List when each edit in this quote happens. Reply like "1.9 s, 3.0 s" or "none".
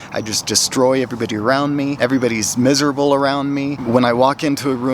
1.9 s, 3.8 s